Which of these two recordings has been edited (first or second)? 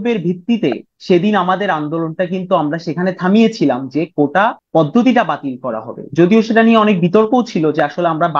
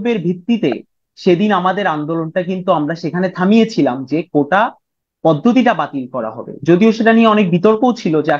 first